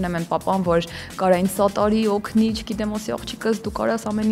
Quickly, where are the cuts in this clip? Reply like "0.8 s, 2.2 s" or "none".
none